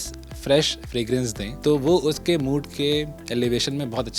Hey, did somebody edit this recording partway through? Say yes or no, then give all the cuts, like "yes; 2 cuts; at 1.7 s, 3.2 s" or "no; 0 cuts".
yes; 2 cuts; at 1.4 s, 3.2 s